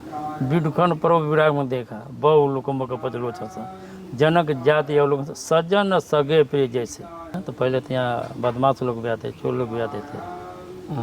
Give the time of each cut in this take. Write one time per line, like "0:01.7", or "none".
0:07.4

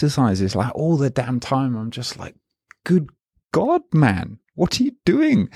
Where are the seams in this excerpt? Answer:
none

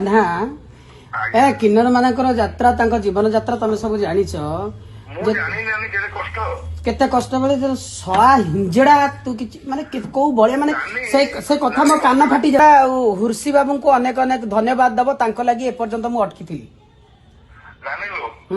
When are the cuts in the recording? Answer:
0:12.6

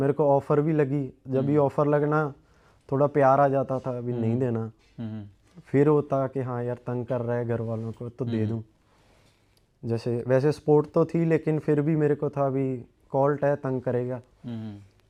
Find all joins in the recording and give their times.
none

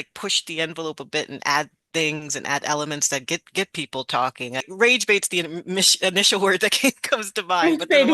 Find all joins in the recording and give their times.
0:04.7

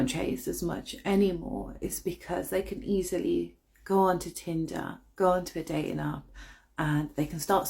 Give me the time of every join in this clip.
none

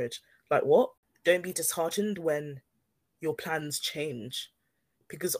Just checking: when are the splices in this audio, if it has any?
0:01.0

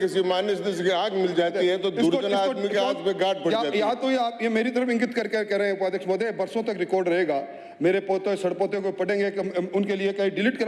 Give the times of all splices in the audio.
none

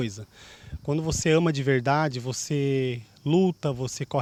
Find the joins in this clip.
none

